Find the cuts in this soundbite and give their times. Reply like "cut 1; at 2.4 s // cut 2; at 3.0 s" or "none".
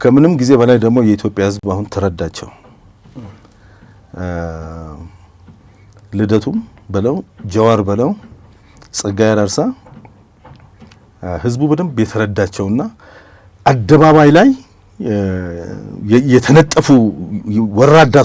none